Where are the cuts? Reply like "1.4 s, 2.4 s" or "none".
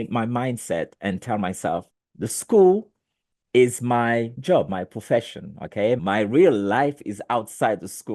2.0 s, 4.3 s, 6.0 s